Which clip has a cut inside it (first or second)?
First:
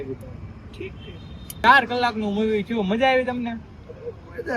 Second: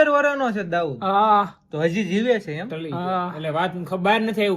first